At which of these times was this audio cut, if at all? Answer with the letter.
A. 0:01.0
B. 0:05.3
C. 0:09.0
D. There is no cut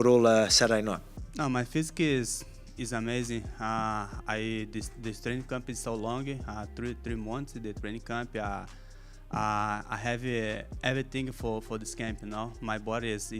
A